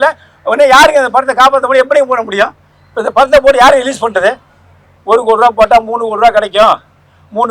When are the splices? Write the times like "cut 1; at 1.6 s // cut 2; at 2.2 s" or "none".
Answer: cut 1; at 4.9 s